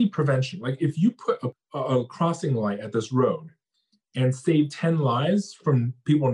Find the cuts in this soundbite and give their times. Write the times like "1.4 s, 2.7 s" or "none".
none